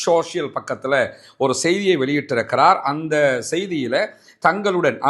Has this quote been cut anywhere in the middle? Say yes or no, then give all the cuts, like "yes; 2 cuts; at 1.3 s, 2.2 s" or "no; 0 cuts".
yes; 1 cut; at 3.0 s